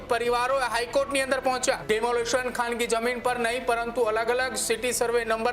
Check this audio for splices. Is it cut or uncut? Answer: cut